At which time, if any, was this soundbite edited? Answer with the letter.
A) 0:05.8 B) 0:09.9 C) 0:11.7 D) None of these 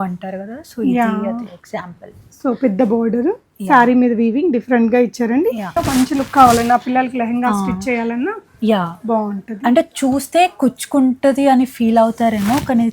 A